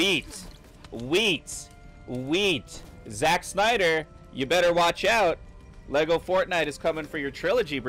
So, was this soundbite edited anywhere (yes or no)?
no